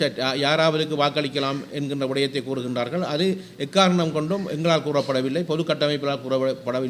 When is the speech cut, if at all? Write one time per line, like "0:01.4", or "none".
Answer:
none